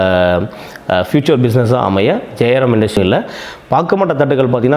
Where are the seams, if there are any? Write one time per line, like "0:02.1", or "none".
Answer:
0:03.0